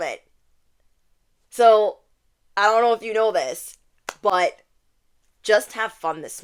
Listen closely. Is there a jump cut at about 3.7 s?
no; 0 cuts

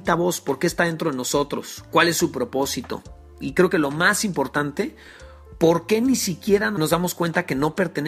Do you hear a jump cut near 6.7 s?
yes; 1 cut; at 6.7 s

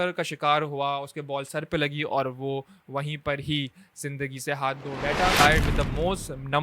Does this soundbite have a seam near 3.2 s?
no; 1 cut; at 5.4 s

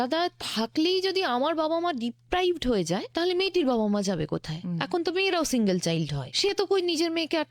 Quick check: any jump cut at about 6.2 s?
yes; 2 cuts; at 3.1 s, 6.2 s

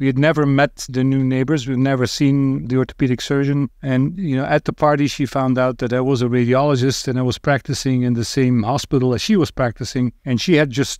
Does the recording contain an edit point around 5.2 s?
no; 3 cuts; at 0.9 s, 2.7 s, 10.2 s

